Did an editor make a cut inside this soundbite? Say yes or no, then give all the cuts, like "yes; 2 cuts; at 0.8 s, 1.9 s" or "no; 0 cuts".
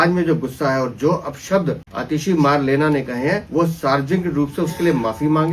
yes; 2 cuts; at 1.9 s, 3.4 s